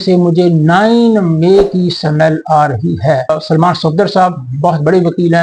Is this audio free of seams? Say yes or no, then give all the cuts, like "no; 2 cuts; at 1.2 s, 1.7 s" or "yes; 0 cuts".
no; 1 cut; at 3.2 s